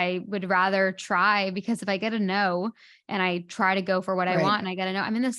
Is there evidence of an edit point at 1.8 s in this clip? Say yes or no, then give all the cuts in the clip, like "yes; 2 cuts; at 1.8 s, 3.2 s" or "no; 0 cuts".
yes; 1 cut; at 1.8 s